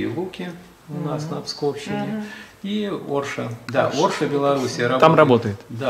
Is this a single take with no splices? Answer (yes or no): no